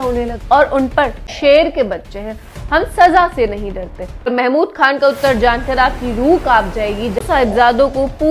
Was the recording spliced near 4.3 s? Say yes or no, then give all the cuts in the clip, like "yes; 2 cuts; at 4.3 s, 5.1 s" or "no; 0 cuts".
yes; 3 cuts; at 1.3 s, 4.3 s, 7.2 s